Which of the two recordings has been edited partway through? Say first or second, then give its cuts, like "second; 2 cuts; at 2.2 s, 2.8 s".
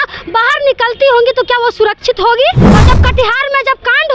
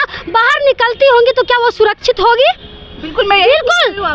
first; 1 cut; at 2.7 s